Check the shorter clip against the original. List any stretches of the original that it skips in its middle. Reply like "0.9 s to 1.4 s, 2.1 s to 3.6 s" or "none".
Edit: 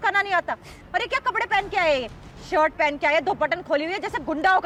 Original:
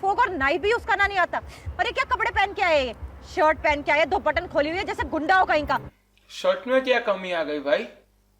none